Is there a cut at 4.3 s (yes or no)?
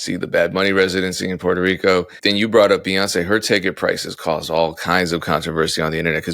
no